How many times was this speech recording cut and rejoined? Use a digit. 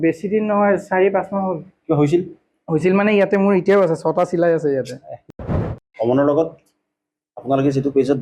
1